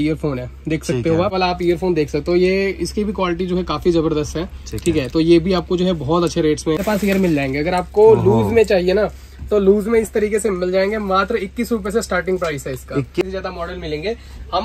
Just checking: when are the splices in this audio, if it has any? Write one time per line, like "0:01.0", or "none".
0:01.3
0:06.8
0:13.3